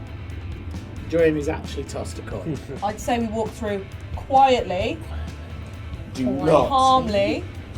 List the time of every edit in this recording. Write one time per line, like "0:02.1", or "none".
0:02.6